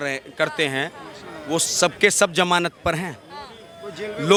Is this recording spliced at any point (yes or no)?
no